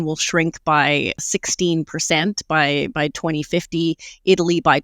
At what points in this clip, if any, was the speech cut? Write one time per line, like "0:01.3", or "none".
0:01.2